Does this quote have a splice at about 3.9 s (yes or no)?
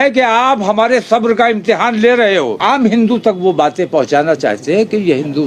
no